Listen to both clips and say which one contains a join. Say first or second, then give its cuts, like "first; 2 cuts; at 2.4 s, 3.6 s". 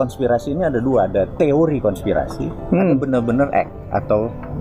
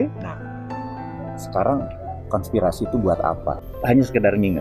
second; 1 cut; at 3.6 s